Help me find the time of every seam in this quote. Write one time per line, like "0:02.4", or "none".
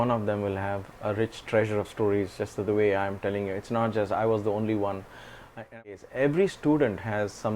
0:05.7